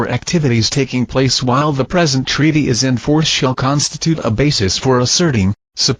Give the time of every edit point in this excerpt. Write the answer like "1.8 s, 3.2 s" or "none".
none